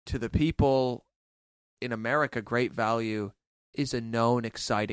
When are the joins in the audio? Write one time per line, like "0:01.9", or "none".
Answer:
none